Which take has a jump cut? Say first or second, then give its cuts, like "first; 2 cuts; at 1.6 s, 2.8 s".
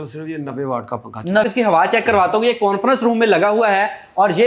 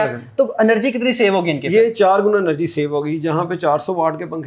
first; 1 cut; at 1.4 s